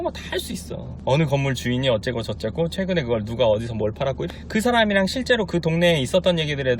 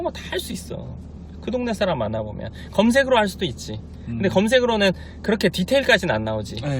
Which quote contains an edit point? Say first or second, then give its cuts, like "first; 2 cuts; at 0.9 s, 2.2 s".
first; 2 cuts; at 0.9 s, 4.2 s